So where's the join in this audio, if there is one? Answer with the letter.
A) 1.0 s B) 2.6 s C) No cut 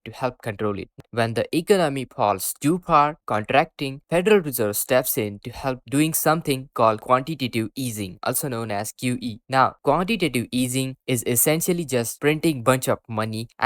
A